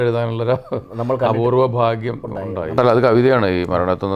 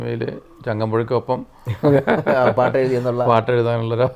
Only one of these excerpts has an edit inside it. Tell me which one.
first; 1 cut; at 2.7 s

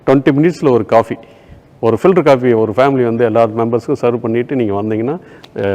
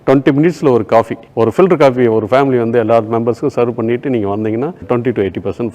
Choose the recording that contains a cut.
second; 2 cuts; at 1.2 s, 4.8 s

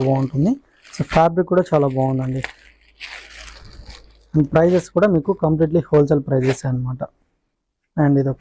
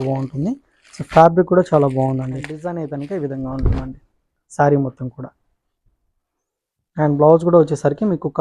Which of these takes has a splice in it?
second; 1 cut; at 2.6 s

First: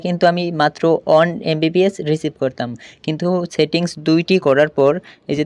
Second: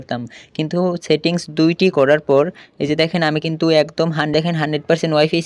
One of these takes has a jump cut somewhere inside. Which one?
second; 1 cut; at 4.3 s

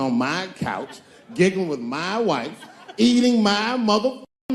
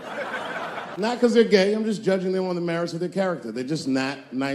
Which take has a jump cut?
second; 1 cut; at 1.1 s

